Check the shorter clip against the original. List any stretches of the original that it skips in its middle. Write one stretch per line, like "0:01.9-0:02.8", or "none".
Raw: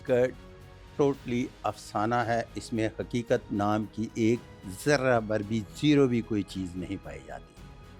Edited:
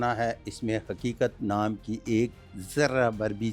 none